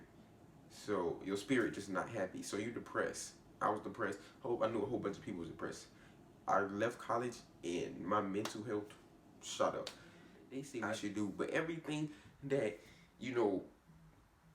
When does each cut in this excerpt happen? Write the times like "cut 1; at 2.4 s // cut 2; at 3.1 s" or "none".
cut 1; at 10.6 s